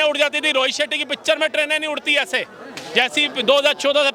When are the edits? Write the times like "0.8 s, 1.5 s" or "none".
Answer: none